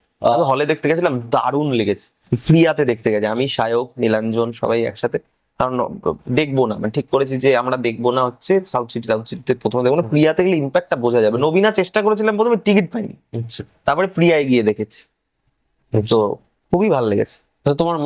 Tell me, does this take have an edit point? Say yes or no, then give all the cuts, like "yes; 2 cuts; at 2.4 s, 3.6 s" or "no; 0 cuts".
no; 0 cuts